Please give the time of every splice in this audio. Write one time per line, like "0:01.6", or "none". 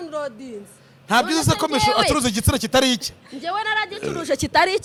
none